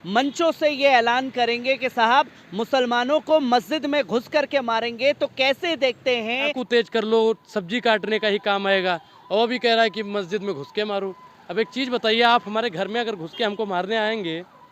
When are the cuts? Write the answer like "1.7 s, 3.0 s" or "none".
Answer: 6.6 s